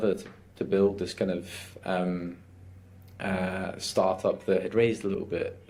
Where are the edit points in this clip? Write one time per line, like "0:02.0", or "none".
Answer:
none